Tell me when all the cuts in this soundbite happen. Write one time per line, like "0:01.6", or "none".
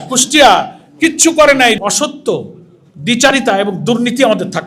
0:01.8